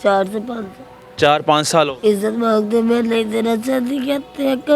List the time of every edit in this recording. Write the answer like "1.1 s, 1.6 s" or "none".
1.9 s

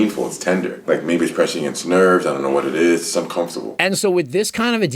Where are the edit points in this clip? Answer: 0.8 s, 3.7 s

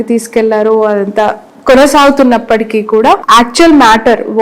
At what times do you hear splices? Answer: 3.2 s

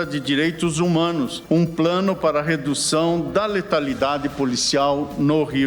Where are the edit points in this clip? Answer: 1.4 s

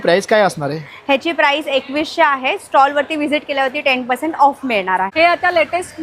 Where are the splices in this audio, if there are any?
5.1 s

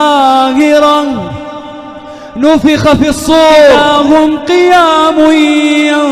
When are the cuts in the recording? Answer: 3.8 s

